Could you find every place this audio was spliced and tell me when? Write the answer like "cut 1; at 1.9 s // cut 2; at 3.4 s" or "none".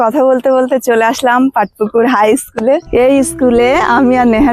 cut 1; at 2.9 s